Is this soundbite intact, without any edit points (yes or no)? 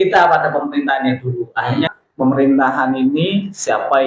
no